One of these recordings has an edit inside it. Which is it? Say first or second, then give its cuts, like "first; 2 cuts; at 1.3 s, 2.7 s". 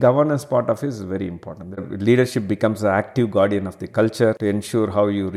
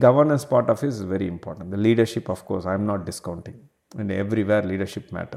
first; 2 cuts; at 1.8 s, 4.4 s